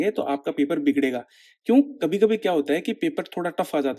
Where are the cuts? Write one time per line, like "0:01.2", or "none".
none